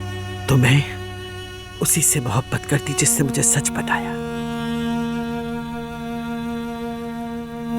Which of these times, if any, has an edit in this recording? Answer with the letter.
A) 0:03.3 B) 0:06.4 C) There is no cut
C